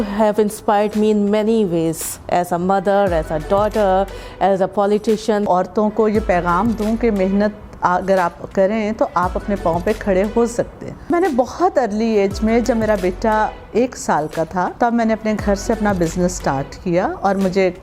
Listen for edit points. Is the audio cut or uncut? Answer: cut